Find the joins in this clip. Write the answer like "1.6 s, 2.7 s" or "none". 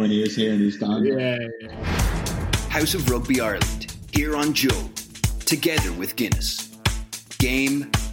1.8 s